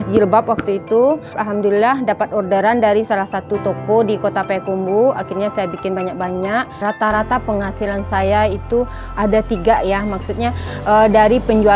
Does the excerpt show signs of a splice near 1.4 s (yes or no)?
yes